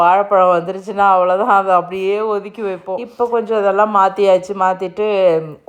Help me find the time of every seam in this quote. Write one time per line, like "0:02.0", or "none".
0:03.1